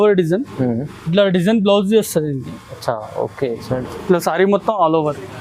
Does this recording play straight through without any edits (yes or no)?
yes